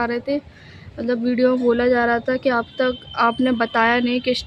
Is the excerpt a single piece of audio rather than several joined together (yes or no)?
yes